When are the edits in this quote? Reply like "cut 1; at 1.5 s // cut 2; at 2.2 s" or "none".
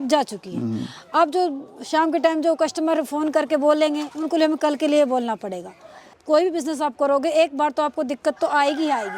cut 1; at 6.1 s